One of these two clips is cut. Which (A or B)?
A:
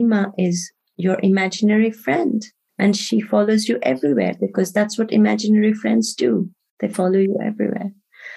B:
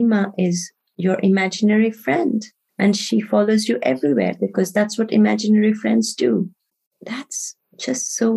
B